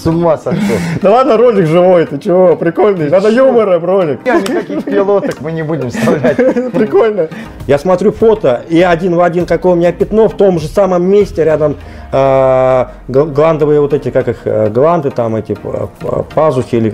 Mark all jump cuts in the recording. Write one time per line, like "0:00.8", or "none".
0:07.4